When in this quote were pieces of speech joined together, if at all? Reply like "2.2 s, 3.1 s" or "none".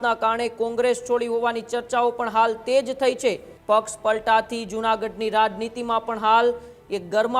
3.5 s